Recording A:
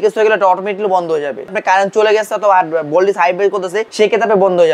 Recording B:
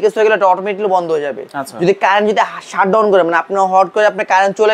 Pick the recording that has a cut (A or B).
A